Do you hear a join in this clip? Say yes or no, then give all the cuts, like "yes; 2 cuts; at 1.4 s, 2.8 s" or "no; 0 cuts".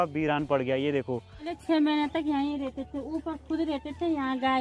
yes; 1 cut; at 1.5 s